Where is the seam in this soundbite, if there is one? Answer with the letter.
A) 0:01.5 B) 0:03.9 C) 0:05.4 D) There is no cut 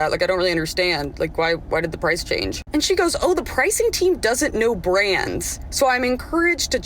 D